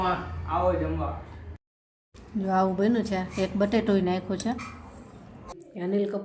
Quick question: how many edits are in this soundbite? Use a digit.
2